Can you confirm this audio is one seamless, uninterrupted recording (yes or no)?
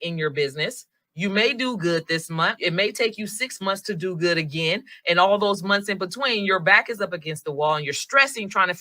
no